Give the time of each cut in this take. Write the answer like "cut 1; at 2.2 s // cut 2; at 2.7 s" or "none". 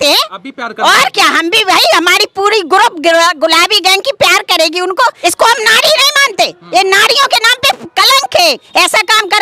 cut 1; at 5.2 s // cut 2; at 8.6 s